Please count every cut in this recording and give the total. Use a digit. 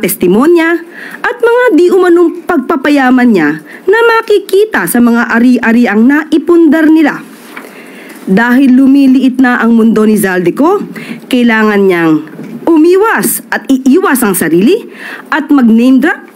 0